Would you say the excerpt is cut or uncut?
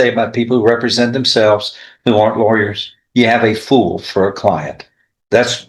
uncut